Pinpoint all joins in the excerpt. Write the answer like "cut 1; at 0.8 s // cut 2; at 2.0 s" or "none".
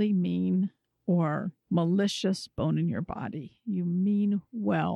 cut 1; at 1.5 s